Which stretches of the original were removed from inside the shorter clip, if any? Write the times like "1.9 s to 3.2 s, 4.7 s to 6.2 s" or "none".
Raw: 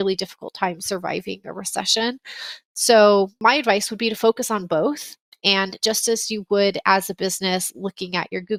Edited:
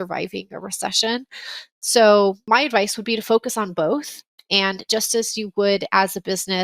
none